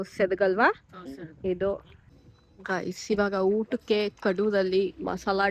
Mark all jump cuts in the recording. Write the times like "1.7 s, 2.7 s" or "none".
2.2 s